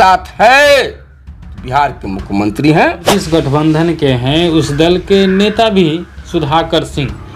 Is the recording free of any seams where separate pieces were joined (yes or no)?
no